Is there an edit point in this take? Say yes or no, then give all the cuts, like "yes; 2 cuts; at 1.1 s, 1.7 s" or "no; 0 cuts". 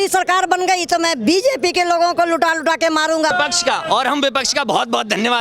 yes; 1 cut; at 3.3 s